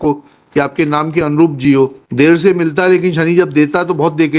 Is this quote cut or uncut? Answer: cut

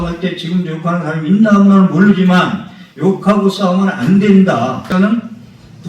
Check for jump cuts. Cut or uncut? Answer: cut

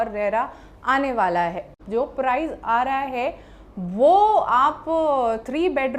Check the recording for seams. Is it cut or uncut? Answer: cut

